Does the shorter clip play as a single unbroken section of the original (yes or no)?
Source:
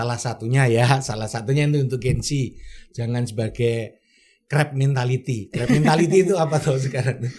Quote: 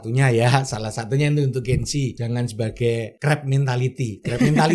no